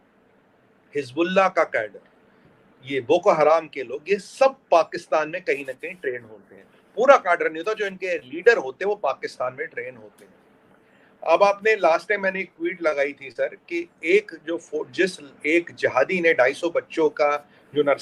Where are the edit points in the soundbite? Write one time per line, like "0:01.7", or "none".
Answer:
none